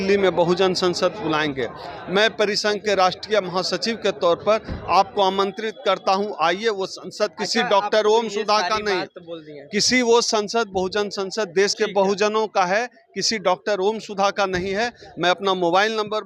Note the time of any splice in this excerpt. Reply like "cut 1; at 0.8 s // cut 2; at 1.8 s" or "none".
none